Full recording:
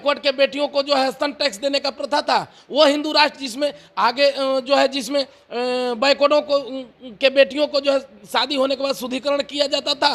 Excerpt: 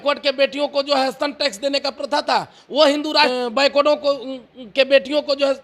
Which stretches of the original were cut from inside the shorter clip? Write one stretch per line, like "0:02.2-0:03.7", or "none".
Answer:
0:03.3-0:05.8